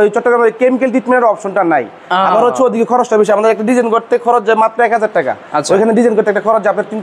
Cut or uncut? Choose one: uncut